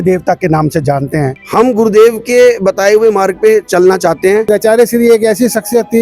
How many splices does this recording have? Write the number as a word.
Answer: two